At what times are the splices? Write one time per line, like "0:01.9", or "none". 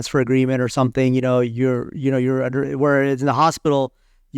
none